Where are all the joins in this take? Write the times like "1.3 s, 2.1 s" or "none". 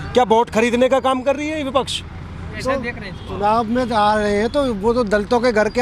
2.5 s